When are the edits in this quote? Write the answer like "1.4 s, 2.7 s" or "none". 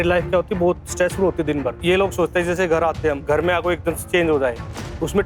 1.8 s, 3.2 s, 4.0 s